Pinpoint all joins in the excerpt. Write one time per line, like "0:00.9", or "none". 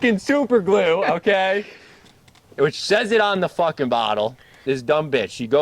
0:04.6